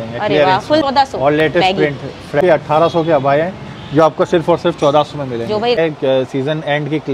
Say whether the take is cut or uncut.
cut